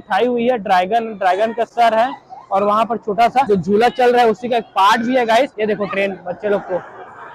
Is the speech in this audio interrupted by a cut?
no; 0 cuts

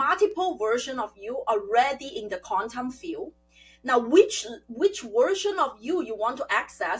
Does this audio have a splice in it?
no; 0 cuts

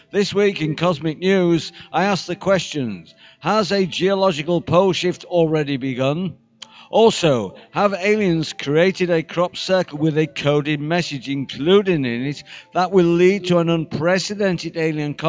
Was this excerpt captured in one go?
no; 1 cut; at 7.3 s

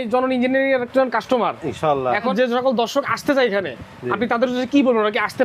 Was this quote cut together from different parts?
yes; 1 cut; at 2.3 s

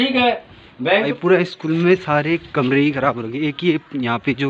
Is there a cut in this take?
yes; 1 cut; at 1.1 s

